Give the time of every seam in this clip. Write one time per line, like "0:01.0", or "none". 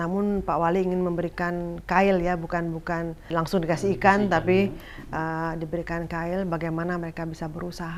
none